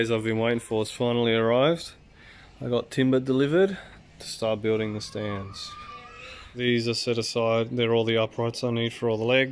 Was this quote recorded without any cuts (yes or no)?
yes